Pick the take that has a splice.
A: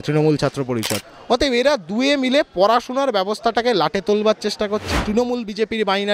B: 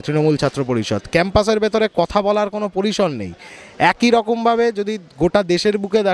A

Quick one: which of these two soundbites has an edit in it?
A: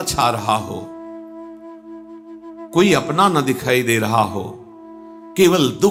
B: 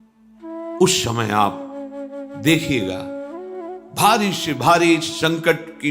B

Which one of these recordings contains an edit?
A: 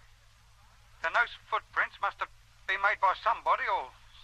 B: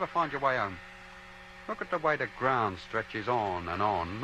B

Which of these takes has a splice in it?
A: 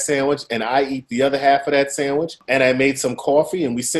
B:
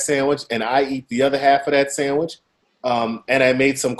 A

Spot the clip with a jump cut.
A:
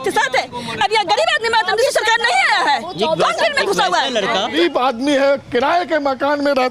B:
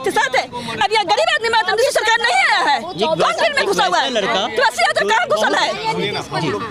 A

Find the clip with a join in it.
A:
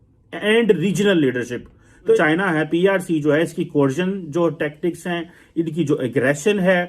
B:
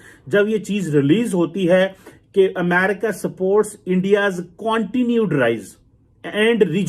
A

